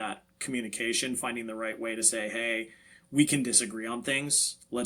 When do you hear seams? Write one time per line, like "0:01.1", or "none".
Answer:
none